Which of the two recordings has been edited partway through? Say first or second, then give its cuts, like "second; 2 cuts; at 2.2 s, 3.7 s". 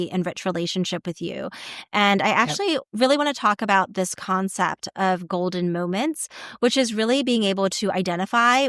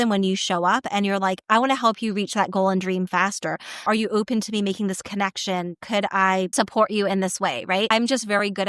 second; 3 cuts; at 3.9 s, 6.5 s, 7.9 s